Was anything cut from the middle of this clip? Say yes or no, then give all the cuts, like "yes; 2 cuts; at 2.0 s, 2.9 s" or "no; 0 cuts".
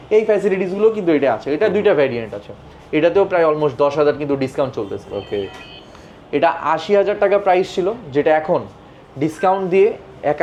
no; 0 cuts